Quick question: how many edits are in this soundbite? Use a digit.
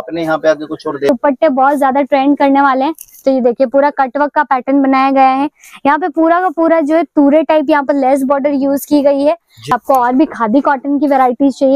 2